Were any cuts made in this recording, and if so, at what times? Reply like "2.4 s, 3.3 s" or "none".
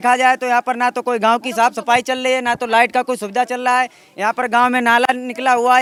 none